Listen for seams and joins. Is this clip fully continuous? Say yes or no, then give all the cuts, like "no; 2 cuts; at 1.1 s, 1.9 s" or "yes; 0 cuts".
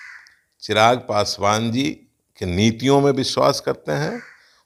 yes; 0 cuts